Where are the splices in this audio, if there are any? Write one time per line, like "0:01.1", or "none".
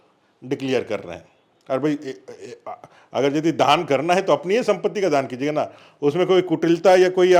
none